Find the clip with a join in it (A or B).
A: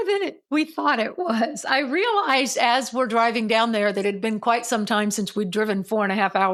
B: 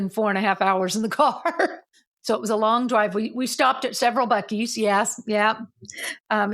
B